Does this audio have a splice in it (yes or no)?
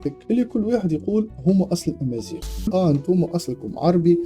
yes